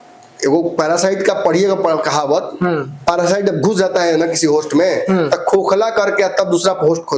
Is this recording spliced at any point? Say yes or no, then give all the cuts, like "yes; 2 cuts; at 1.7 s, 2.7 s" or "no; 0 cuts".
no; 0 cuts